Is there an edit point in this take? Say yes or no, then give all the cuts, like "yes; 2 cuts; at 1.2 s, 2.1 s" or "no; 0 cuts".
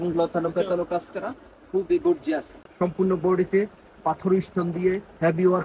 yes; 1 cut; at 2.6 s